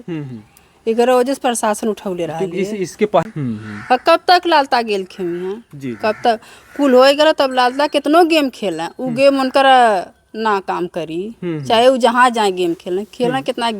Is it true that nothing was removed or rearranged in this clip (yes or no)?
no